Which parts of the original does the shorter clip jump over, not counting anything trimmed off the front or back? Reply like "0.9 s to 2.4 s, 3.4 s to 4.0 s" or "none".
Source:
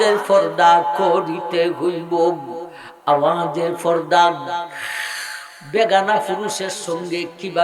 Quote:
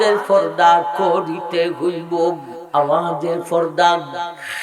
2.5 s to 2.9 s